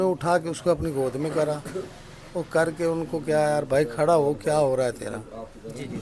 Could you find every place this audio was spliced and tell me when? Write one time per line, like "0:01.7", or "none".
none